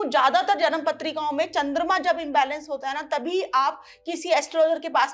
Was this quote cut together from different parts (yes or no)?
no